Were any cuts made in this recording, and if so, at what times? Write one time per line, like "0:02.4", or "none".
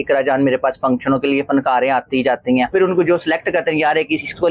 0:02.7

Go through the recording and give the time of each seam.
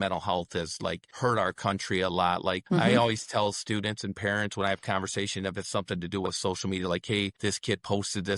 0:01.1
0:02.6
0:07.3

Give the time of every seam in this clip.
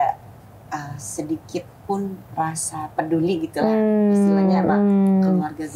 0:02.2

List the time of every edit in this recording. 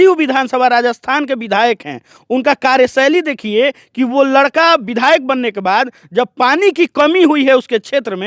none

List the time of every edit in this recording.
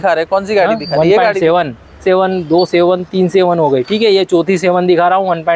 0:02.0

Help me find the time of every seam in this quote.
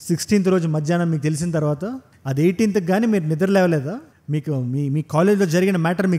none

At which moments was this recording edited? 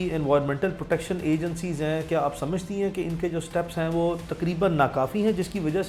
none

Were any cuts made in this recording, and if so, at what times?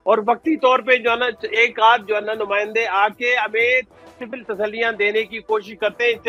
none

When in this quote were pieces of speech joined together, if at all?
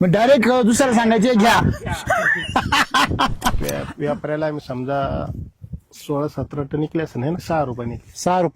0:03.6
0:07.4

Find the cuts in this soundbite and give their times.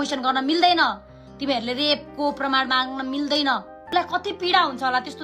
0:03.8

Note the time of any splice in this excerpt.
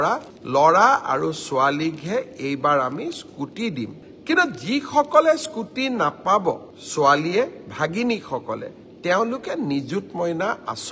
none

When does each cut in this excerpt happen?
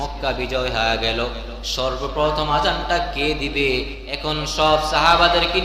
0:04.0

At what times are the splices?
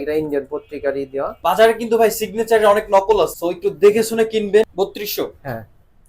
0:01.4
0:03.3
0:04.7

